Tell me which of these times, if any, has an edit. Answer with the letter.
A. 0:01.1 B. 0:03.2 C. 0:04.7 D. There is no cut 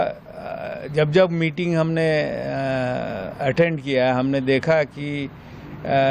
D